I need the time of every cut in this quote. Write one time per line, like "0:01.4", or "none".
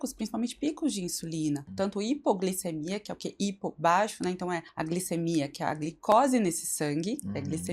0:01.7
0:04.7